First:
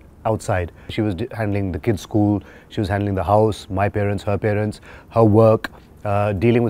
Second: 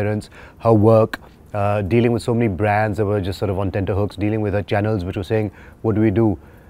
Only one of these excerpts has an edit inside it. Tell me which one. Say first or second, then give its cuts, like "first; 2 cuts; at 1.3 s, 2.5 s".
first; 1 cut; at 0.9 s